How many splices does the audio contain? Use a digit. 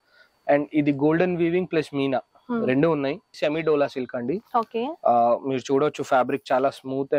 1